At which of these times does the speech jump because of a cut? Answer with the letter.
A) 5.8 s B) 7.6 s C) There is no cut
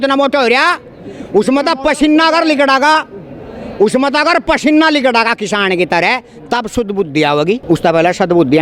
B